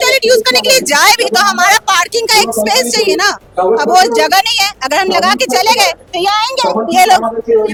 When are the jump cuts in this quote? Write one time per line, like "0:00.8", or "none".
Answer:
none